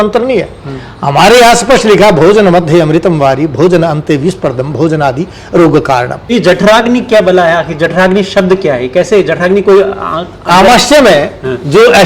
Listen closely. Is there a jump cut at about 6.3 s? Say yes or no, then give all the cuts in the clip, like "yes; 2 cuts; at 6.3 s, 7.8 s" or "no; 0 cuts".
yes; 1 cut; at 6.3 s